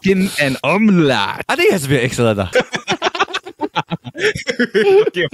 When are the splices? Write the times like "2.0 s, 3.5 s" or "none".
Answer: 1.4 s, 2.5 s